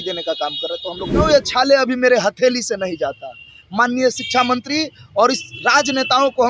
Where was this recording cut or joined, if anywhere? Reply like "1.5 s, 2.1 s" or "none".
1.2 s